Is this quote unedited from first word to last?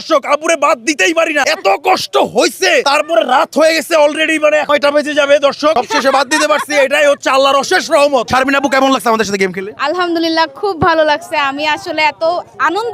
yes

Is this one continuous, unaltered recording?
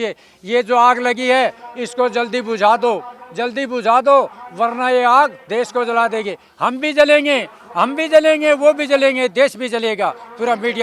yes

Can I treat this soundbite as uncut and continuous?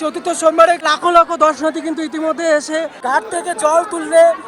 no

